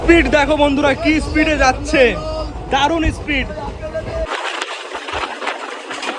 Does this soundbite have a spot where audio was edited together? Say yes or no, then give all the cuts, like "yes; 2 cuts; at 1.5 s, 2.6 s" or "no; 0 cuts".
yes; 1 cut; at 4.3 s